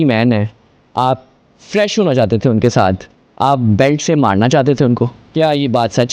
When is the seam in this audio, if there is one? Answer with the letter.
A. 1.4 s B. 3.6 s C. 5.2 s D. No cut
C